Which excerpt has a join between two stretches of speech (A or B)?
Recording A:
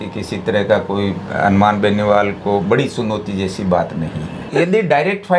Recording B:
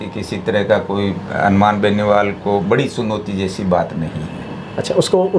A